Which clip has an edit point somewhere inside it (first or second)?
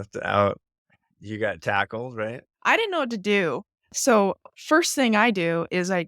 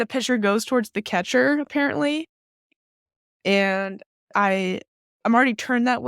first